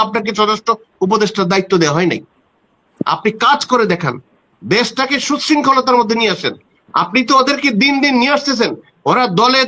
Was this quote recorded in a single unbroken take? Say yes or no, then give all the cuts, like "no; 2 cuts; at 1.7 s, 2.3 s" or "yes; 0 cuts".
yes; 0 cuts